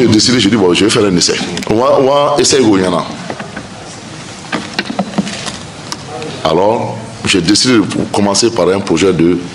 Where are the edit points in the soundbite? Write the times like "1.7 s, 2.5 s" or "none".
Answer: none